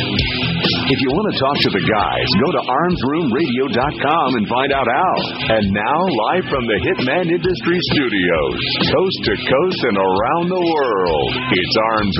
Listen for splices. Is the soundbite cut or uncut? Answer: uncut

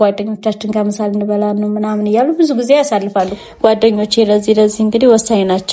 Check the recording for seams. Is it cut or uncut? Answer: cut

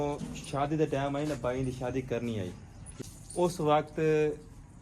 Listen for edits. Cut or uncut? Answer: cut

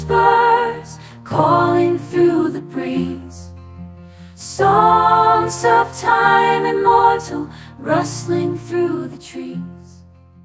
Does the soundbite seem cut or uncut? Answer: uncut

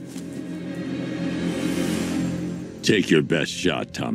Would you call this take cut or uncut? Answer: cut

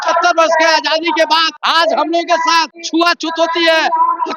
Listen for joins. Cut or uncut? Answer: cut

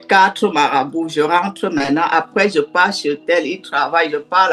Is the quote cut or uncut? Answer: uncut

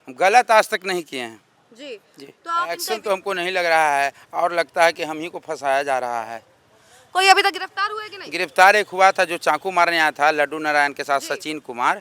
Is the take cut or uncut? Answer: cut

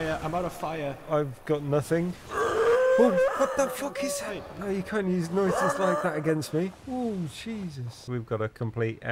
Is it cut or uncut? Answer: cut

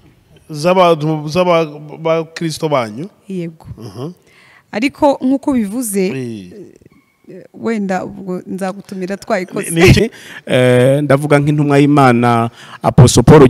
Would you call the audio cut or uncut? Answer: cut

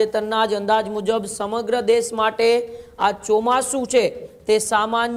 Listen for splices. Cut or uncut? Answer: uncut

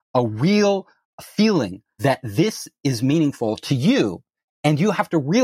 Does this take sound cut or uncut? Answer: cut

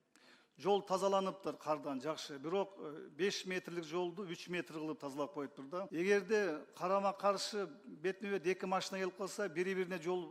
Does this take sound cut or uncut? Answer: cut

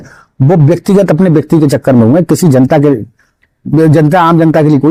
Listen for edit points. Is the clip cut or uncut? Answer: uncut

